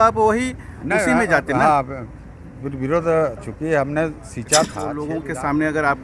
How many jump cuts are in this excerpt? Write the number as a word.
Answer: one